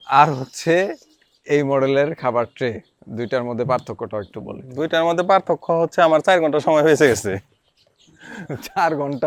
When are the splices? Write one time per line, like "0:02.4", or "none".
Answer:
none